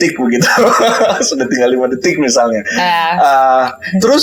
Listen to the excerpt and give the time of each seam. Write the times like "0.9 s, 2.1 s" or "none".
none